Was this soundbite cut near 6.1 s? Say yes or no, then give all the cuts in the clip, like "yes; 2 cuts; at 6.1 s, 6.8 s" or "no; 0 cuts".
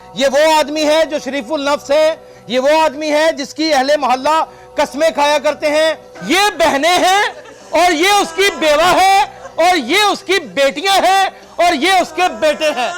yes; 1 cut; at 6.1 s